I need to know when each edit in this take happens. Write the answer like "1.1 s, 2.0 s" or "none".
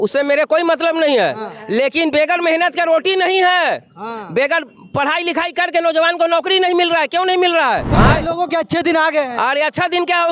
7.9 s